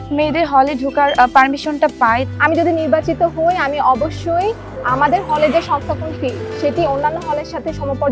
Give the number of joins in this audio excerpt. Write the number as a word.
one